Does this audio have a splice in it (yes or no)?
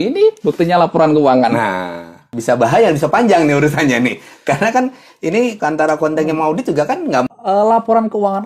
yes